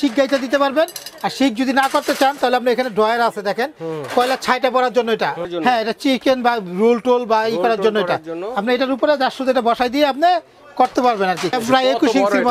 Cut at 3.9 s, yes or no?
no